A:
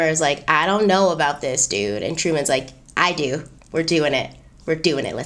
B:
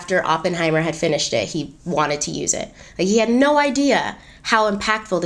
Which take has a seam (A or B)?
A